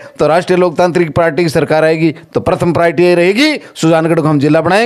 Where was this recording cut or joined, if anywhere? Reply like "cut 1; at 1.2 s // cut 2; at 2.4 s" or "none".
none